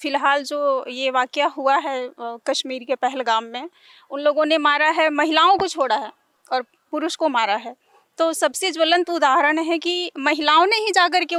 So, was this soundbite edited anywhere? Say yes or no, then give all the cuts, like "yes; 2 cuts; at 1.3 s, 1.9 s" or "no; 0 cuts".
no; 0 cuts